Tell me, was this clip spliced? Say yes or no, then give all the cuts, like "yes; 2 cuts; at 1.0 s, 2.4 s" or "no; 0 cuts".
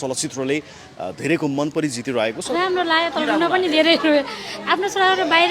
yes; 1 cut; at 2.5 s